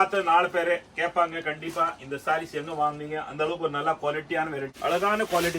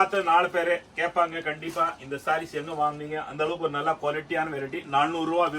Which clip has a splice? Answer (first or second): first